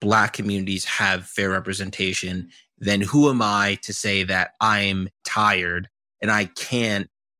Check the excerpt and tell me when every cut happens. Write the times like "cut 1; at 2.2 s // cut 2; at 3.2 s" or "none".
none